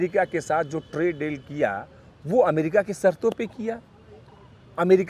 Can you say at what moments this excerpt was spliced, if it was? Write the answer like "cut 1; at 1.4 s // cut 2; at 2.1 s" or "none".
none